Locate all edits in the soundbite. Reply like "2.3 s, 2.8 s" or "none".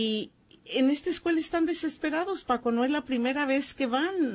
none